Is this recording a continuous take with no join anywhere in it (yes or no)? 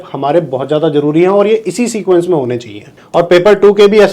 no